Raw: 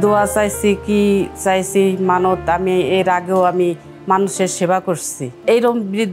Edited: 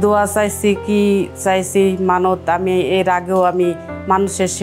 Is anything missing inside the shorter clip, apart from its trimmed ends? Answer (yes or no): no